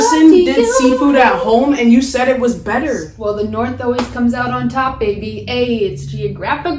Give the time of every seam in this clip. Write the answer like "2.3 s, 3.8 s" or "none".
3.1 s

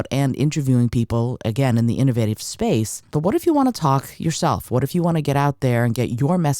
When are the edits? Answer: 3.1 s

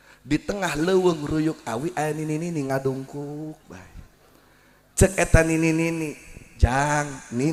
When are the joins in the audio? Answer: none

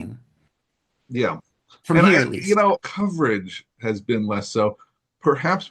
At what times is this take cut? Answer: 2.9 s

